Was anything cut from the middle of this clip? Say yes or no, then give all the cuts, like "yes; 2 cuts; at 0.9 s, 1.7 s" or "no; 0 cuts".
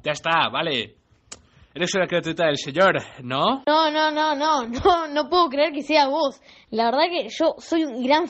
no; 0 cuts